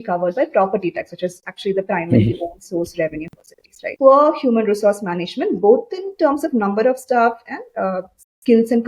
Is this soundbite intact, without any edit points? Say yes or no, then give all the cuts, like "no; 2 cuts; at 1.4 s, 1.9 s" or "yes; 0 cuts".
no; 1 cut; at 3.9 s